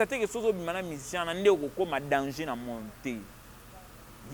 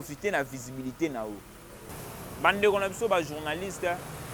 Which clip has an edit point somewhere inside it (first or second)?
second